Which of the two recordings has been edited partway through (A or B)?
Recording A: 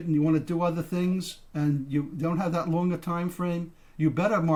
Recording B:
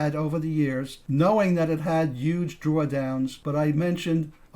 B